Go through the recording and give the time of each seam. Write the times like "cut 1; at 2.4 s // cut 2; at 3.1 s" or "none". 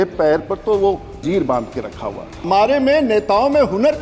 cut 1; at 1.2 s // cut 2; at 2.5 s